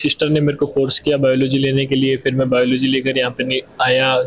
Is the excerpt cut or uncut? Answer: uncut